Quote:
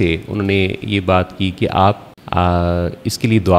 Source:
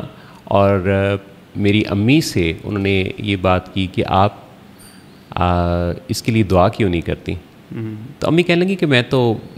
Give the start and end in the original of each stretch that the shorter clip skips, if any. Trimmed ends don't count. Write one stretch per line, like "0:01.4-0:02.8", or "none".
0:04.5-0:05.2